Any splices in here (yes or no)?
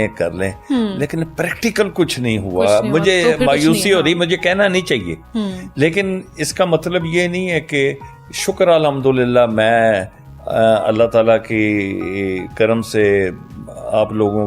no